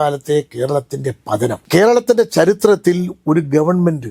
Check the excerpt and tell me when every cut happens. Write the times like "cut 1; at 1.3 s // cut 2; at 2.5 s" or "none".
cut 1; at 1.6 s